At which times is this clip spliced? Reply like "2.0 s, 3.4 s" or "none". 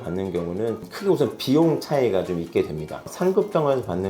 0.9 s, 3.1 s